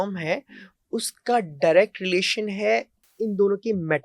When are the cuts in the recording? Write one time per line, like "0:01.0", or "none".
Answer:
0:03.0